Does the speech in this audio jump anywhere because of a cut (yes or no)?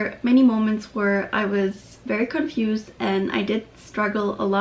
no